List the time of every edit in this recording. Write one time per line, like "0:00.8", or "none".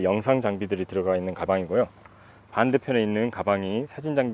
0:01.4